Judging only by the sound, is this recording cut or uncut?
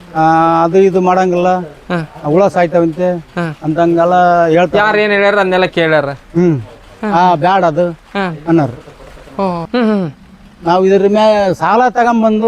cut